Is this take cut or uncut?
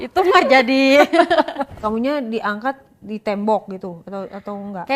cut